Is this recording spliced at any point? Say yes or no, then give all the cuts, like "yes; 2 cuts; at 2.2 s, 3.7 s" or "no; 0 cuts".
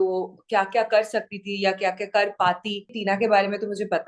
yes; 1 cut; at 2.9 s